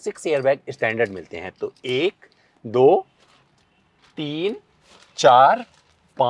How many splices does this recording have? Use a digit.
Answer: 0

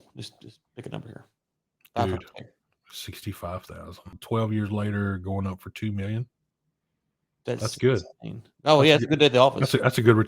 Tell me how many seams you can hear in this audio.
1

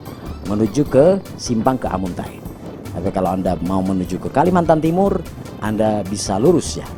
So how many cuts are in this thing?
0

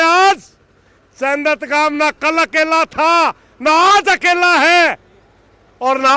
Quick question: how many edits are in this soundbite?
0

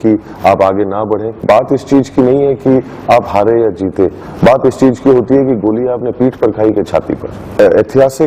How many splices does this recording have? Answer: 2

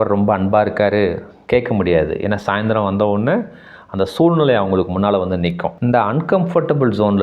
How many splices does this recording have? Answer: 1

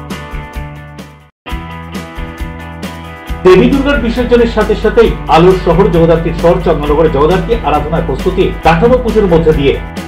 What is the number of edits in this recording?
1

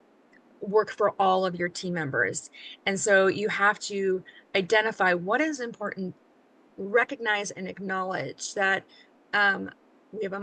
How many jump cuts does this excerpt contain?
1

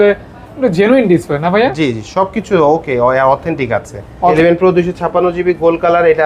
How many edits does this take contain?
1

